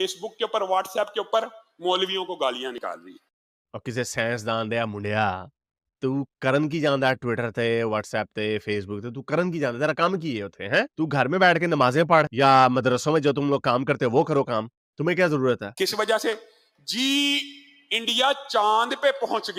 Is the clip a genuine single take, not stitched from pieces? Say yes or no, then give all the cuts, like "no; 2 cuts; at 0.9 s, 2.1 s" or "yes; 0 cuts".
yes; 0 cuts